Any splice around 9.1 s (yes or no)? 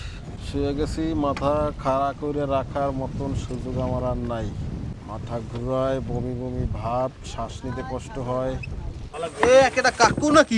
yes